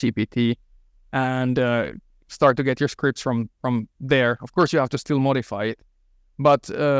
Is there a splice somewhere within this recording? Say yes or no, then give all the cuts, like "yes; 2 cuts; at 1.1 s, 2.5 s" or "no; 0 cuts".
no; 0 cuts